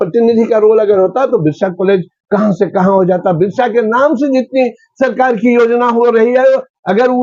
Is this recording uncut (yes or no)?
yes